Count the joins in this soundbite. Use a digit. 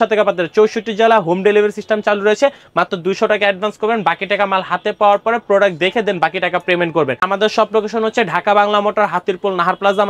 1